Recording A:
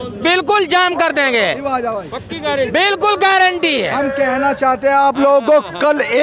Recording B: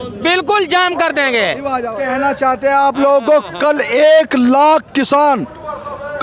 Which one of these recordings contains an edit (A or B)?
B